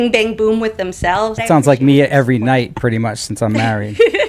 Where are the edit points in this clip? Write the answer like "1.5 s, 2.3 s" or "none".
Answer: 1.4 s